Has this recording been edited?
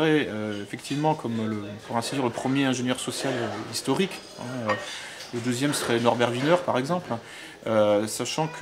no; 0 cuts

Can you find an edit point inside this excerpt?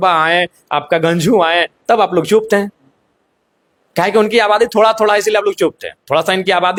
no; 0 cuts

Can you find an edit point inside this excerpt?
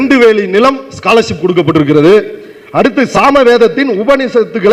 yes; 1 cut; at 3.1 s

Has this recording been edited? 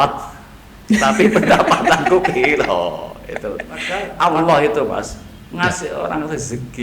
yes; 1 cut; at 4.0 s

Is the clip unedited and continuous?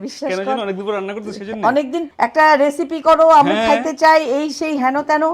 no; 1 cut; at 2.0 s

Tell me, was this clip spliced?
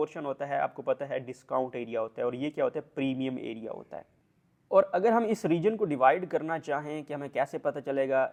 no; 0 cuts

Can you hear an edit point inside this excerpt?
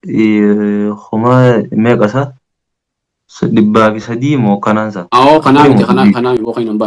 no; 0 cuts

